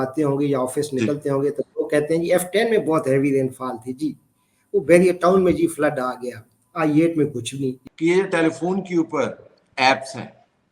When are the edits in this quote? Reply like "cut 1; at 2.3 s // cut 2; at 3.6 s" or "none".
cut 1; at 7.7 s